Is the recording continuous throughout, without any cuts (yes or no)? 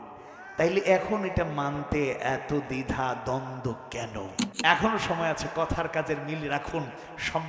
no